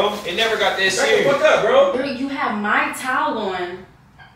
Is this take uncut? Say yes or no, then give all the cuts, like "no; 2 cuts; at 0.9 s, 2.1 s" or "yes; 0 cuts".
no; 1 cut; at 1.9 s